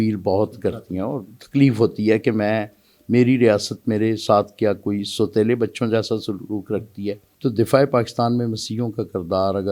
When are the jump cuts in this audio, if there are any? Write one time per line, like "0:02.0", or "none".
0:07.3